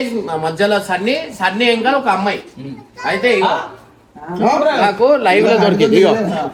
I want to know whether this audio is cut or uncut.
uncut